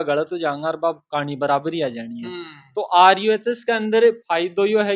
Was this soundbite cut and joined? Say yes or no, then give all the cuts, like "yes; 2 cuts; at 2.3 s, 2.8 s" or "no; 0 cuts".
no; 0 cuts